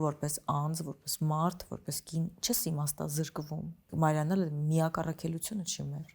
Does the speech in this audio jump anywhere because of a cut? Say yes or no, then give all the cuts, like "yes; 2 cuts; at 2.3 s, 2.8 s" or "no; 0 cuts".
yes; 1 cut; at 3.8 s